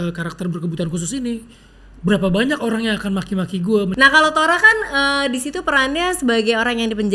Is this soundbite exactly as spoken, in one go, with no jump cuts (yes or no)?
no